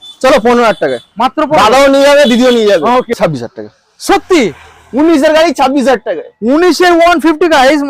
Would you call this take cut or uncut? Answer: cut